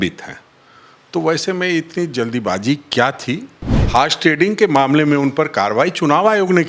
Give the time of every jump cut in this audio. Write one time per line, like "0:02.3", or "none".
0:03.7